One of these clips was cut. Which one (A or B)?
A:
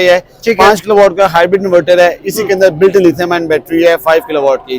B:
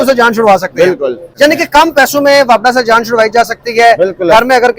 B